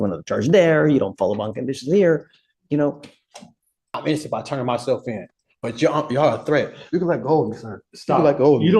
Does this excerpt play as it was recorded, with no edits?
no; 1 cut; at 3.9 s

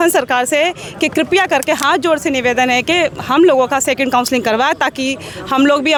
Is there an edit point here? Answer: no; 0 cuts

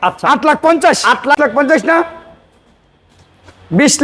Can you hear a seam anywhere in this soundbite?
yes; 1 cut; at 1.4 s

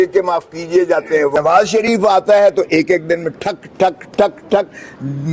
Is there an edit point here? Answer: yes; 1 cut; at 1.3 s

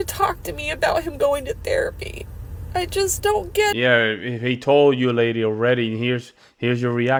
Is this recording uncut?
yes; 0 cuts

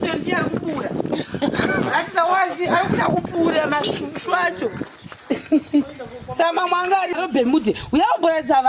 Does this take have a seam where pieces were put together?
yes; 1 cut; at 7.2 s

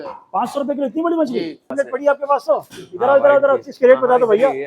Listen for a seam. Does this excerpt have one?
yes; 1 cut; at 1.7 s

